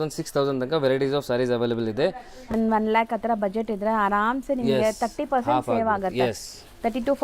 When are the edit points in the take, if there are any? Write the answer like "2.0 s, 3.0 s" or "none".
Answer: 2.6 s